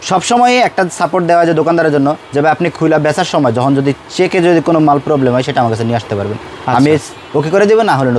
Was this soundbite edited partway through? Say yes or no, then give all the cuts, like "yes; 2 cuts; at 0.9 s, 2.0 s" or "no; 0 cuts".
no; 0 cuts